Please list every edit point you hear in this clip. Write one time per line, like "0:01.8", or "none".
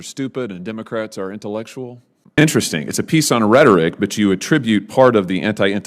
0:02.4